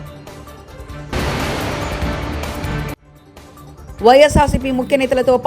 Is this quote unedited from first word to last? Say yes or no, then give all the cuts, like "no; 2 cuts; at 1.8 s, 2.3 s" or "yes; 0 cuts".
no; 2 cuts; at 1.1 s, 3.1 s